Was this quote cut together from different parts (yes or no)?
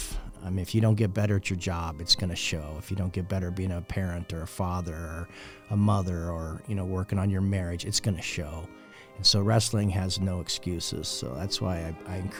no